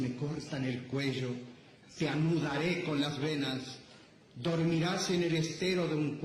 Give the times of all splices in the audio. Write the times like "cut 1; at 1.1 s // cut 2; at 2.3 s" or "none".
none